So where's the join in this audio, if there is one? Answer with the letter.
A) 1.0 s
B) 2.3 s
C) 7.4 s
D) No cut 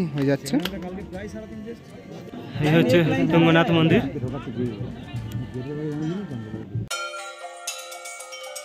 D